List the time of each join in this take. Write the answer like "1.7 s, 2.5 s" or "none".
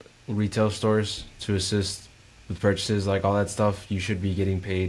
none